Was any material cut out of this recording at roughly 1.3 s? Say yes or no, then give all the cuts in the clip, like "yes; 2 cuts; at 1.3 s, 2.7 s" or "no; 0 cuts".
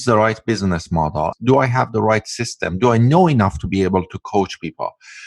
yes; 1 cut; at 1.3 s